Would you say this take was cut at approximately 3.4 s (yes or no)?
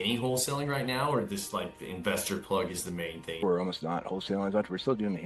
yes